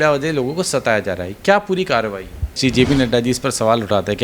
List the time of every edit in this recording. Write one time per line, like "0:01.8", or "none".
0:02.6